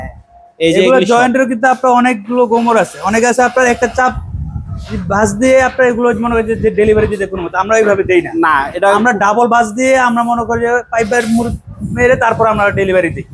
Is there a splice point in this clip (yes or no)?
no